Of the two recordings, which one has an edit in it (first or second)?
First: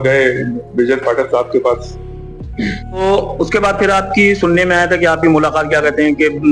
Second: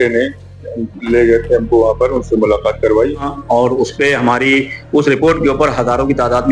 second